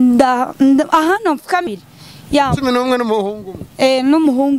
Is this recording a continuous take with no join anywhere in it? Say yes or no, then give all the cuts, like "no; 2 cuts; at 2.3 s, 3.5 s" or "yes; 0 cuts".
no; 1 cut; at 1.6 s